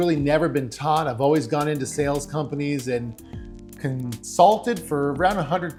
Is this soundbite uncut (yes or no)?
yes